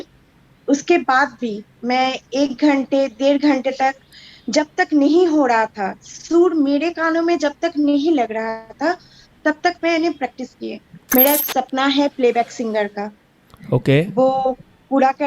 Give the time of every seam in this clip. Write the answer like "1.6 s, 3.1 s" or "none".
10.9 s